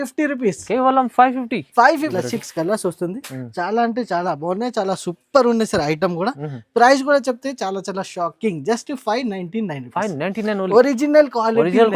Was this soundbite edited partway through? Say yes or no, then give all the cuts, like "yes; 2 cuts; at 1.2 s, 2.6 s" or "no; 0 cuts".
yes; 1 cut; at 2.1 s